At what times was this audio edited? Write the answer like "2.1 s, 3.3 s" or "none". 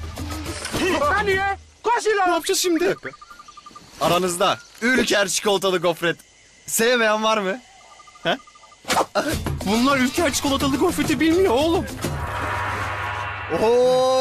none